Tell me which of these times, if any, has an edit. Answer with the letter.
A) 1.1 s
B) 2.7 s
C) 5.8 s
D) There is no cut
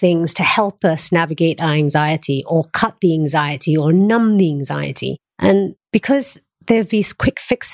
C